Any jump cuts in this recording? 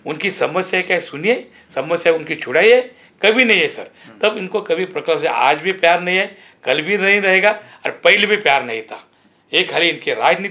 no; 0 cuts

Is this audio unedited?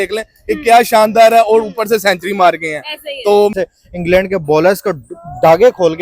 no; 1 cut; at 3.5 s

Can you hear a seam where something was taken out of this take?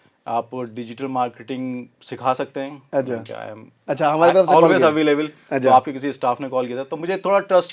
no; 0 cuts

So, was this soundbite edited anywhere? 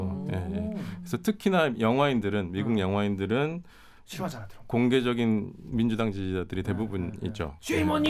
no; 0 cuts

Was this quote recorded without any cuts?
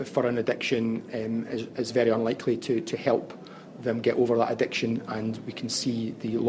yes; 0 cuts

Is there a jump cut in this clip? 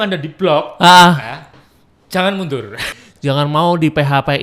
yes; 1 cut; at 2.9 s

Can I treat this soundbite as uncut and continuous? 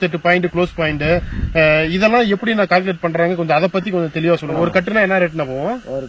no; 1 cut; at 4.5 s

